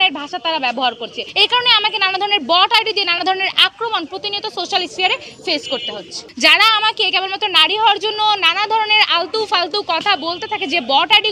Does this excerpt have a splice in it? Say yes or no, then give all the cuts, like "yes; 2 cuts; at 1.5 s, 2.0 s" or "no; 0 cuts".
yes; 2 cuts; at 1.2 s, 6.2 s